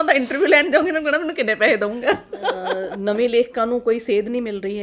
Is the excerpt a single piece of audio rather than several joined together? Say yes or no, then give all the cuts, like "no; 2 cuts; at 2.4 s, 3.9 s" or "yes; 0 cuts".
no; 1 cut; at 2.9 s